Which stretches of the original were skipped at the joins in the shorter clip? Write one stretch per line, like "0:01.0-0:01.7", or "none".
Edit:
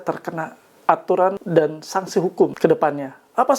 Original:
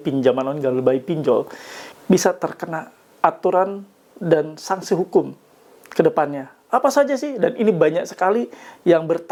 0:03.8-0:04.2
0:05.3-0:05.9